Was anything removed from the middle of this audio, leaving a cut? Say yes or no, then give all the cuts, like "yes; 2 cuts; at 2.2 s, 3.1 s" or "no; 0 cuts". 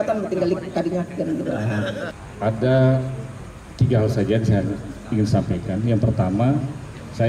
yes; 1 cut; at 2.1 s